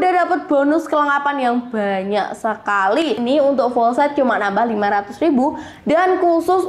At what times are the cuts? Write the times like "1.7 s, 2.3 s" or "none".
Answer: 3.2 s